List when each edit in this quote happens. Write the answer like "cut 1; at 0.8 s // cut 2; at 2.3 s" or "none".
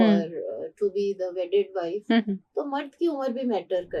none